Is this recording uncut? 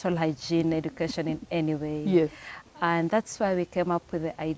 yes; 0 cuts

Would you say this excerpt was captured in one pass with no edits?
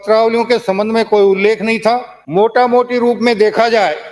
no; 1 cut; at 2.1 s

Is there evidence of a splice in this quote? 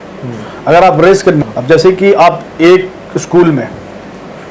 yes; 1 cut; at 1.4 s

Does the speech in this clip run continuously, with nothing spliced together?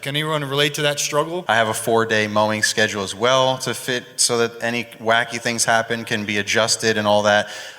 no; 1 cut; at 1.5 s

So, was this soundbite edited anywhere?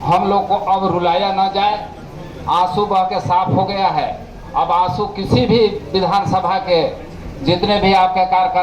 no; 0 cuts

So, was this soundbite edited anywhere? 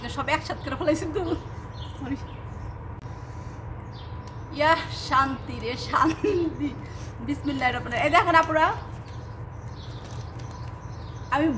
no; 0 cuts

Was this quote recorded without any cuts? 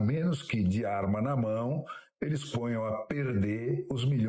yes; 0 cuts

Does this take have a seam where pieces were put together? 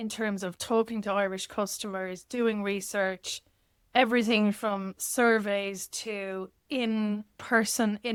no; 0 cuts

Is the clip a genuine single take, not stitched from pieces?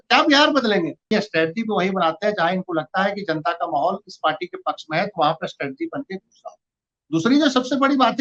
no; 1 cut; at 1.0 s

